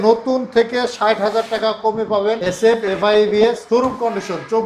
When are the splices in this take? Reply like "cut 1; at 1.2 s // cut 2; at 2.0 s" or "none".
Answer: cut 1; at 2.4 s // cut 2; at 3.6 s